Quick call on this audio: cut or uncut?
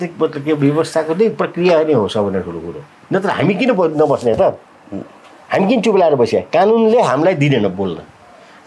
uncut